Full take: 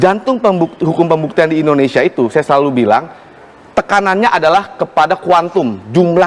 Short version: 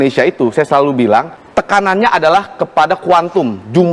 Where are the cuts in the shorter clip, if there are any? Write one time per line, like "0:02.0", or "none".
0:01.4